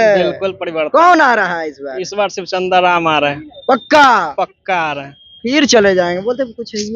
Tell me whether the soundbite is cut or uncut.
uncut